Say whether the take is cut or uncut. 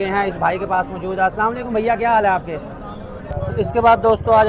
cut